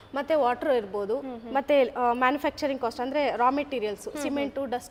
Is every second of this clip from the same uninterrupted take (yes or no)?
yes